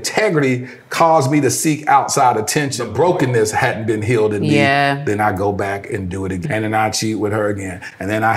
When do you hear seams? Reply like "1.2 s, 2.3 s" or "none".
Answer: 2.8 s, 6.4 s